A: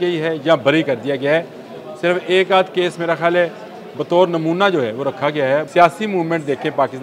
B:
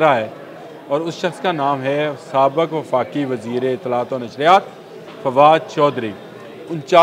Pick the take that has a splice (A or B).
A